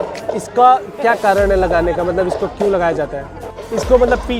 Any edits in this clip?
yes; 1 cut; at 3.5 s

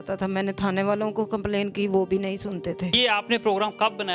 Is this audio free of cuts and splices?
no; 1 cut; at 2.9 s

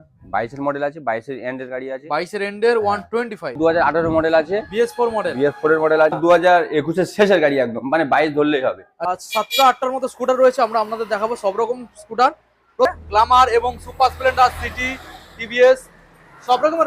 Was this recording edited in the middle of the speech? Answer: yes; 4 cuts; at 3.6 s, 6.2 s, 8.9 s, 12.9 s

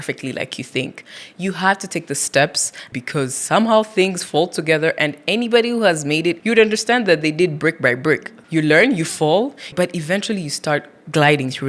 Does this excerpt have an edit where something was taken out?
yes; 4 cuts; at 2.8 s, 6.4 s, 8.3 s, 9.7 s

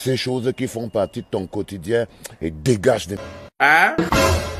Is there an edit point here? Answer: yes; 1 cut; at 3.1 s

